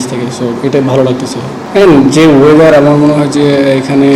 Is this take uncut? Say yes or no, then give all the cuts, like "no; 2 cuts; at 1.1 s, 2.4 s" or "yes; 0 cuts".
yes; 0 cuts